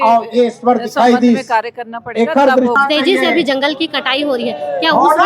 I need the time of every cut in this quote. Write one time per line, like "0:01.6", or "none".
0:02.8